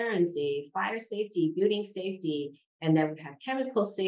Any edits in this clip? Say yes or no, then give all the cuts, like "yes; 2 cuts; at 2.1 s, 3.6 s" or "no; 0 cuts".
no; 0 cuts